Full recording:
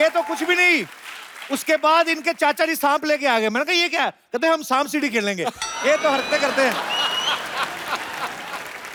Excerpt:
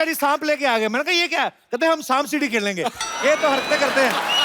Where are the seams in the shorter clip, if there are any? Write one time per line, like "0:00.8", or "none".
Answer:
none

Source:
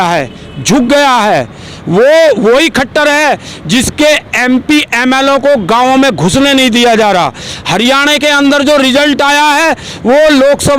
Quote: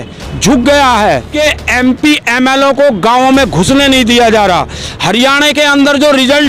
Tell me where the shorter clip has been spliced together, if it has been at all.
0:01.3

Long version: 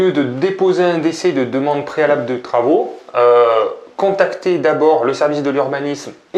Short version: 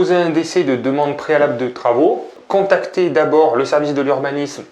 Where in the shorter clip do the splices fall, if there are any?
0:02.3

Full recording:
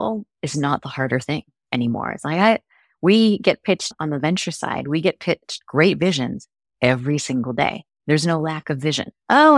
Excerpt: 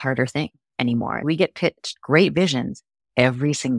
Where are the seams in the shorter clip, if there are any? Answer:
0:01.2

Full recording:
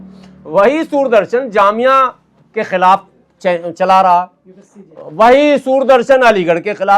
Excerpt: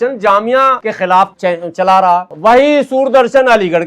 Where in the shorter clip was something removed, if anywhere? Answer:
0:01.2
0:02.3

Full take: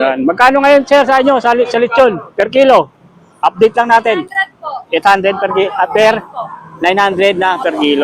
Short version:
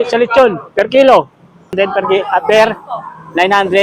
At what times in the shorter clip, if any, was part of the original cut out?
0:01.7

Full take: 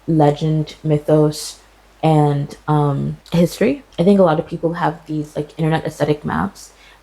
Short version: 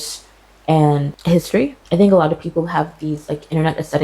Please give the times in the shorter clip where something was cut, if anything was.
0:01.1

